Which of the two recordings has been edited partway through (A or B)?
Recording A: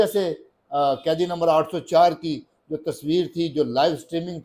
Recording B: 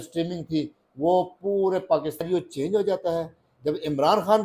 B